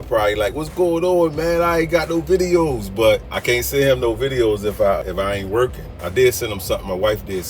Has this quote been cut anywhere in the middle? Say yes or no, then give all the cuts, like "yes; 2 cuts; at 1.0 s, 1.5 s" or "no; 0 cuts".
yes; 2 cuts; at 3.3 s, 5.0 s